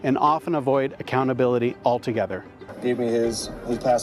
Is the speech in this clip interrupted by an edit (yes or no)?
yes